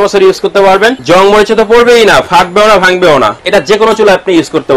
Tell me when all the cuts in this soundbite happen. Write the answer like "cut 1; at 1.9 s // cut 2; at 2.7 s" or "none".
cut 1; at 1.0 s // cut 2; at 3.4 s